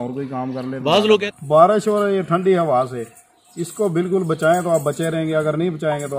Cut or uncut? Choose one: cut